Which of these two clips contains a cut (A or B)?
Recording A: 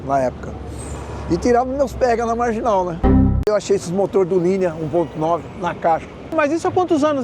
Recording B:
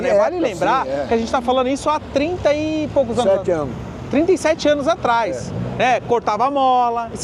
A